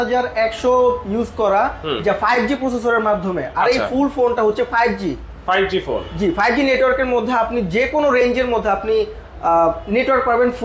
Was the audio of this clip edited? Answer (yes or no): no